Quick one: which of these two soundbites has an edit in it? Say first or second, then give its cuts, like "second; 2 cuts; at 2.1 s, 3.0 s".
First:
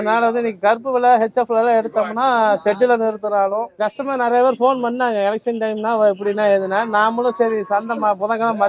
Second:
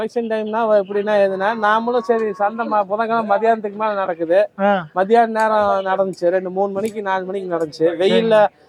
first; 1 cut; at 3.9 s